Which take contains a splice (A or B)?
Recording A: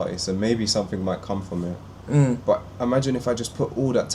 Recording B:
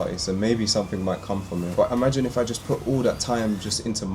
B